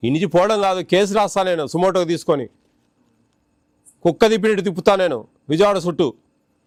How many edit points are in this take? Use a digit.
0